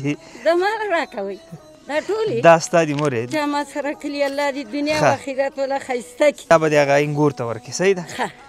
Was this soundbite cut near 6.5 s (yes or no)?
yes